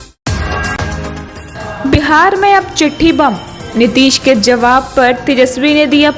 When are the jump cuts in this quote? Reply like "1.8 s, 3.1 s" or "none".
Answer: 1.4 s